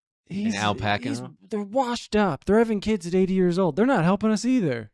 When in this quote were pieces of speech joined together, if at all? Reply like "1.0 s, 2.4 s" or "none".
none